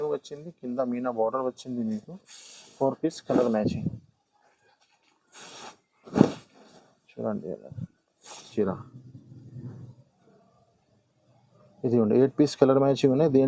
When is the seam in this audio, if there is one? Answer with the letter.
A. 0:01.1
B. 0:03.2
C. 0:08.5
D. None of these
C